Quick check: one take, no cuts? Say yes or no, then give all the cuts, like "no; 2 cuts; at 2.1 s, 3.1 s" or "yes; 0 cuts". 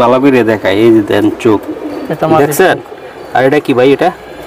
yes; 0 cuts